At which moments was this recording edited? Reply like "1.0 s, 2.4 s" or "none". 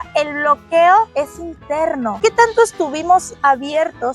2.2 s